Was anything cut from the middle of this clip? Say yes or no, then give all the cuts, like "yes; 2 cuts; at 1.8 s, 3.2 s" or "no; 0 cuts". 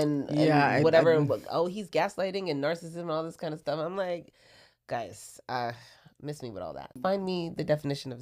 yes; 1 cut; at 7.0 s